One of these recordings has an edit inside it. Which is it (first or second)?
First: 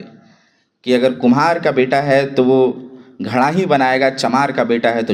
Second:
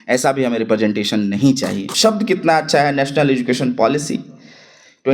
second